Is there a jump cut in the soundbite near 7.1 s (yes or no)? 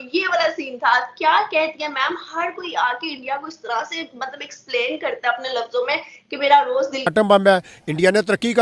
yes